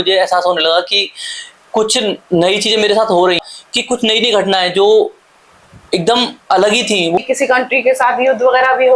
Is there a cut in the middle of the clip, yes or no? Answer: yes